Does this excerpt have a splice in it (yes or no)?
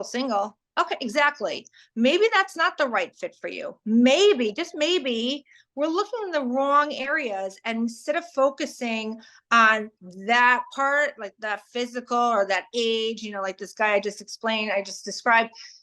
no